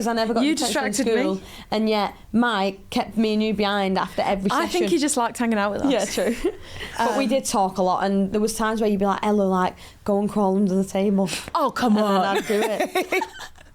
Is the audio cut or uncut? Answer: uncut